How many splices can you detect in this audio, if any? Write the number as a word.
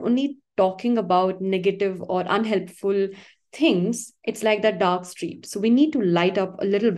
zero